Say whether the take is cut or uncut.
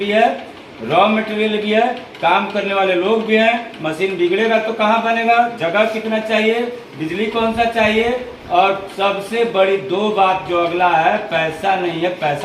uncut